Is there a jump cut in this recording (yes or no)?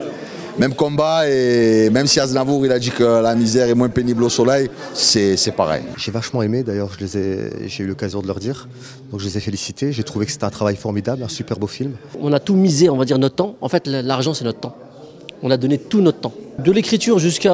yes